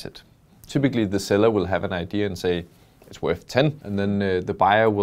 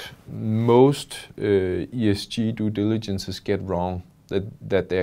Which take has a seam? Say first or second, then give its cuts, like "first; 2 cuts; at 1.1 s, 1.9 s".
first; 1 cut; at 3.8 s